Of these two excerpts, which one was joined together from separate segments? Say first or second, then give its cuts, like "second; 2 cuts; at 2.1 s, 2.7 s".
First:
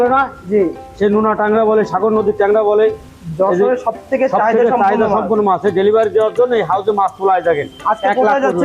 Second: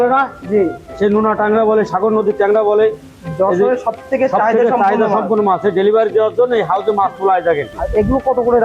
second; 1 cut; at 7.7 s